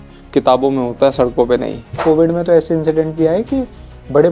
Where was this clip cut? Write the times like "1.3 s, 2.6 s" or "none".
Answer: 2.0 s